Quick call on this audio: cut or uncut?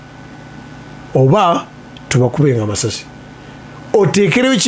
uncut